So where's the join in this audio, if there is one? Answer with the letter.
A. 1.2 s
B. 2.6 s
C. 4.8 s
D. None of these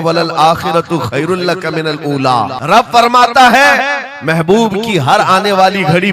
B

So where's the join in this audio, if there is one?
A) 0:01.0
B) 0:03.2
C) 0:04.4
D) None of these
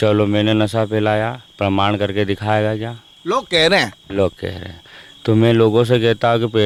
D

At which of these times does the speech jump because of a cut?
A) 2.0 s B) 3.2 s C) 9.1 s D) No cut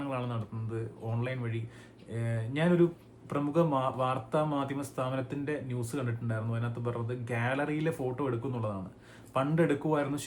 D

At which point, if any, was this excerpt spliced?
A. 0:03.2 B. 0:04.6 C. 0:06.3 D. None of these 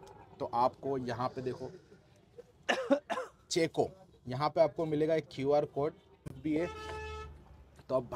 C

